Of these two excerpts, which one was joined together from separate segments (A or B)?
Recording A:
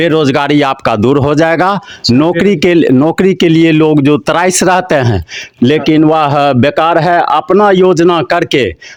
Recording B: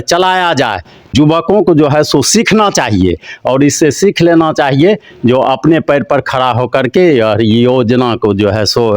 B